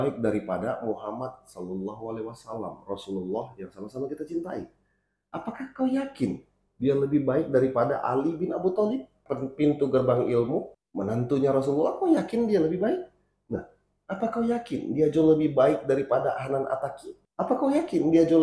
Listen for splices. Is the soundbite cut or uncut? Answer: uncut